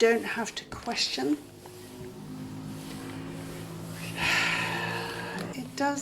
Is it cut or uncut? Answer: uncut